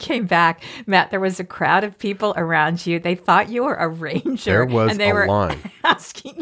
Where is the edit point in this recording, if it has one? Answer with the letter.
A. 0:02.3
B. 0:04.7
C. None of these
C